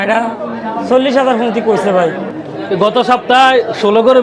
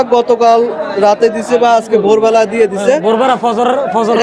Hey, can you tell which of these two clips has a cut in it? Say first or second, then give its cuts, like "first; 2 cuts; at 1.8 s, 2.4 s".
first; 1 cut; at 2.3 s